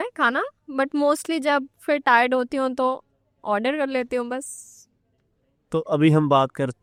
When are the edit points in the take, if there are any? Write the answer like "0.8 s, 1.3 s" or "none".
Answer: none